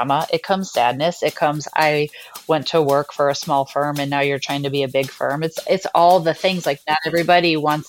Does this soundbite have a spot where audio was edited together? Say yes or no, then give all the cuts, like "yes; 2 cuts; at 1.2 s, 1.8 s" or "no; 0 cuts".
no; 0 cuts